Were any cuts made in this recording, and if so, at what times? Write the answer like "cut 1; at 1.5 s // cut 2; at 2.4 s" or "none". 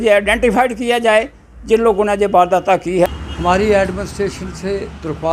cut 1; at 3.2 s